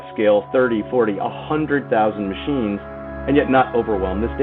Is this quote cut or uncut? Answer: cut